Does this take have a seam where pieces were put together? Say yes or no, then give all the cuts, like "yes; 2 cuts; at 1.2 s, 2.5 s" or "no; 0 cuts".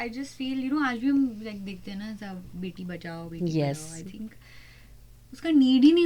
no; 0 cuts